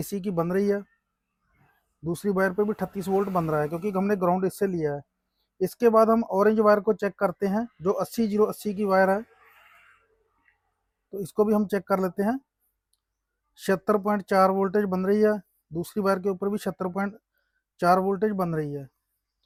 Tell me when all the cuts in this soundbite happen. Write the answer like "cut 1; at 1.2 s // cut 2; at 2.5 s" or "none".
none